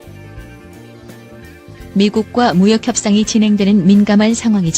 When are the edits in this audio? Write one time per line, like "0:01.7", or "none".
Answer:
0:01.9